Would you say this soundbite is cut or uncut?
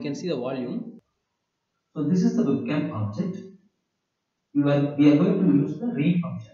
cut